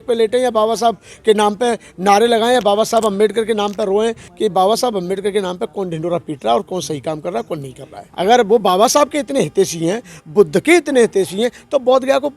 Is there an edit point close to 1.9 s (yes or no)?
no